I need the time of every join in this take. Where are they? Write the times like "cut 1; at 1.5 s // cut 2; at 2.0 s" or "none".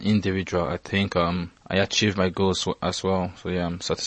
cut 1; at 1.6 s